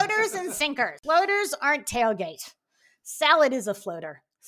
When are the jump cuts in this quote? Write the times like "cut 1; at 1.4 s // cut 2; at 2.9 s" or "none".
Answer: cut 1; at 1.0 s